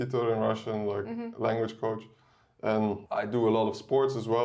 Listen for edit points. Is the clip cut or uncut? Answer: cut